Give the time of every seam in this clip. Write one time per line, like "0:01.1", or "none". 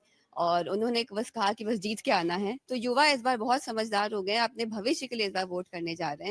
0:02.6